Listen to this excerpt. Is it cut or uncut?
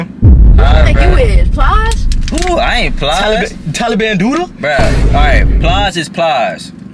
uncut